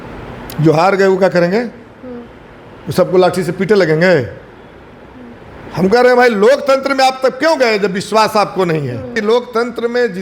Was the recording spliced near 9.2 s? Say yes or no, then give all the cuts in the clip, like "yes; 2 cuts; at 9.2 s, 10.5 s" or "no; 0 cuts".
yes; 1 cut; at 9.2 s